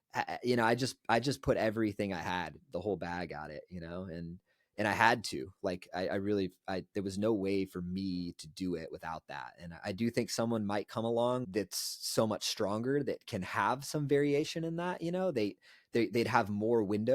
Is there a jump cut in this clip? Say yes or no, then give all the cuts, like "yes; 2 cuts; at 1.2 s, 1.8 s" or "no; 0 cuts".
yes; 1 cut; at 11.4 s